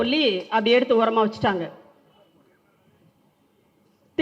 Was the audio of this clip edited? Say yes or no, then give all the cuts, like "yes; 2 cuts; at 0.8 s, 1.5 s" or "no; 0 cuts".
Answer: no; 0 cuts